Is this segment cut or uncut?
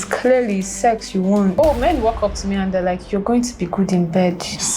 cut